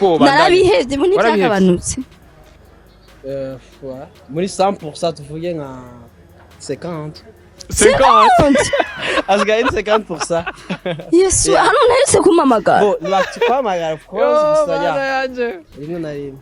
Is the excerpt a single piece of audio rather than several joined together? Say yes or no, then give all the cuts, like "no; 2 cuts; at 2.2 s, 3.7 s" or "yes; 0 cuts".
yes; 0 cuts